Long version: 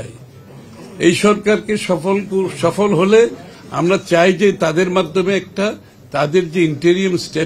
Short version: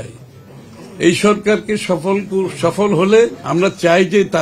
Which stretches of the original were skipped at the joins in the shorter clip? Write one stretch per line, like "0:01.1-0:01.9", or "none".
0:03.4-0:03.7